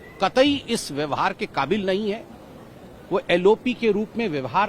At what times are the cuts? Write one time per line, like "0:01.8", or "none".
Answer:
none